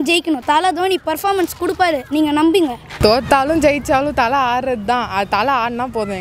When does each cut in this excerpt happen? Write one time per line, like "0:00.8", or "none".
0:02.8